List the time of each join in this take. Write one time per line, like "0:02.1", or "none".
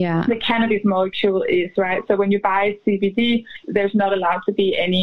0:03.6